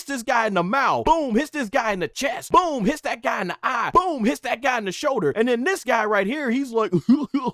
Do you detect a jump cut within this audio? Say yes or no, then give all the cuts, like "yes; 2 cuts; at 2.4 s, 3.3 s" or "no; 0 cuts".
yes; 4 cuts; at 1.0 s, 2.4 s, 3.8 s, 5.3 s